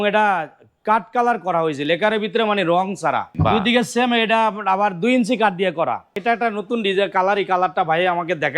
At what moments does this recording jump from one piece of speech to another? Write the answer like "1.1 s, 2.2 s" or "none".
3.3 s, 6.2 s

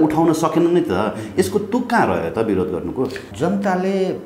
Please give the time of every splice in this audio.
3.3 s

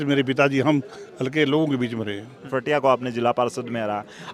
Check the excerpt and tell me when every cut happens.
2.4 s

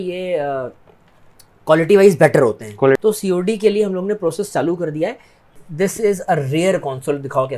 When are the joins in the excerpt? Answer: 3.0 s, 5.6 s

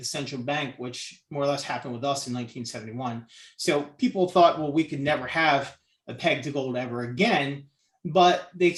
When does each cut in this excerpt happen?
none

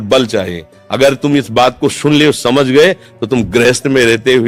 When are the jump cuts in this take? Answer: none

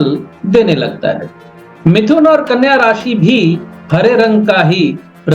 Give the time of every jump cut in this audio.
none

